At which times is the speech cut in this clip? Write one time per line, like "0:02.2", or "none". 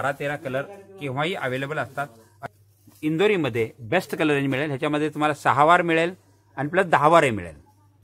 0:02.3